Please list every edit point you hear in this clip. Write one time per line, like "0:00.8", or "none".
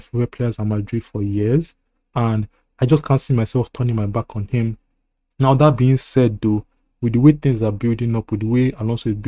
none